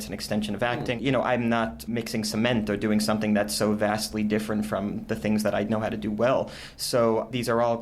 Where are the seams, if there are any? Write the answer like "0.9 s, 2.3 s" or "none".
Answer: 0.9 s